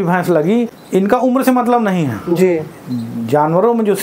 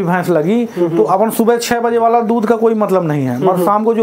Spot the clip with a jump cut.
first; 1 cut; at 1.0 s

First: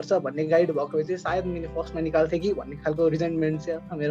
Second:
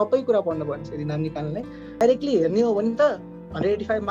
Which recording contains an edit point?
second; 1 cut; at 2.0 s

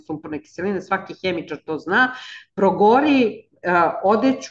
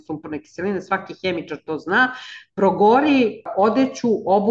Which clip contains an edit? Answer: second; 1 cut; at 3.5 s

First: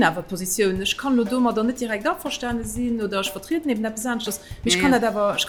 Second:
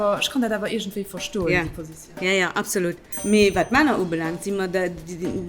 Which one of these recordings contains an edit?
second; 1 cut; at 3.1 s

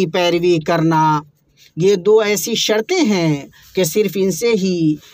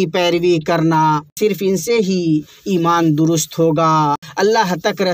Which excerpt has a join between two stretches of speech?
second; 2 cuts; at 1.4 s, 4.3 s

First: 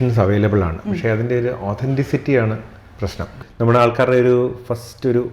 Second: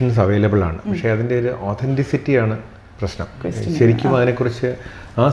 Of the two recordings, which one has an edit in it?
first; 1 cut; at 3.4 s

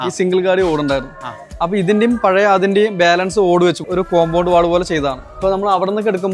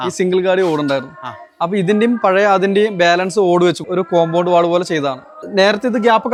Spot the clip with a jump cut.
first; 1 cut; at 5.3 s

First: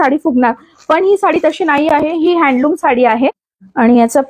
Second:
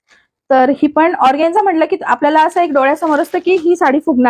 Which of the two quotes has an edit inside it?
first; 1 cut; at 3.0 s

